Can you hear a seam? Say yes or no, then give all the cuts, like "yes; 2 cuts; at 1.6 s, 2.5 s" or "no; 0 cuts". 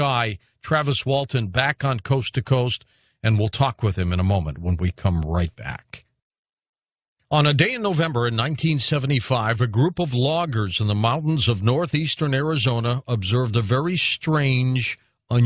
no; 0 cuts